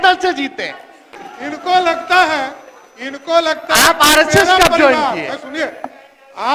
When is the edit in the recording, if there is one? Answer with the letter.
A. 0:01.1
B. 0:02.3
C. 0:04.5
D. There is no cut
A